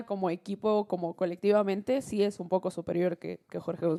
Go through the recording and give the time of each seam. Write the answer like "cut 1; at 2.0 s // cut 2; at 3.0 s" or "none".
none